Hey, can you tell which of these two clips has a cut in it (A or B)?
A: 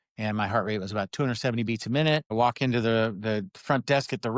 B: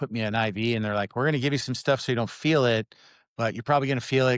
A